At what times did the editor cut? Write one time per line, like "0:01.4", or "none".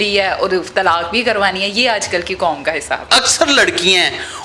0:03.0

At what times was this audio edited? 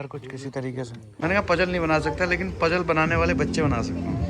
0:01.0

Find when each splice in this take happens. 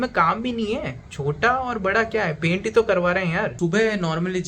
0:03.5

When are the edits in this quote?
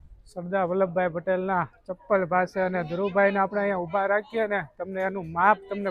none

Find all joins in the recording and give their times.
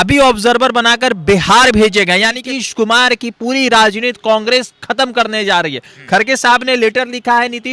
0:02.4

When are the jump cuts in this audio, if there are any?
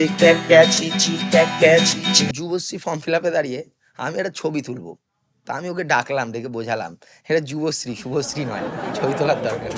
0:02.3

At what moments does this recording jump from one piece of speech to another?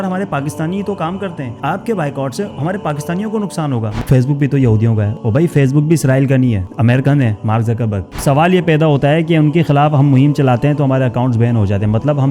0:04.0
0:08.2

